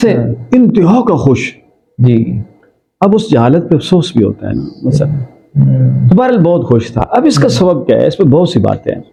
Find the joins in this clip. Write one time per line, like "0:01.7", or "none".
none